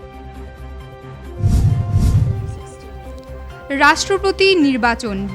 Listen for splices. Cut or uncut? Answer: cut